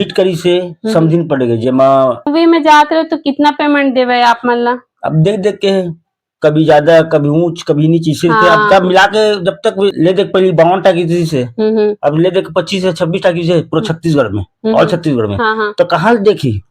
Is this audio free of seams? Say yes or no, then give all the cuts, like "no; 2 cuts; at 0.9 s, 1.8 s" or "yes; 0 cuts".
no; 2 cuts; at 2.3 s, 9.9 s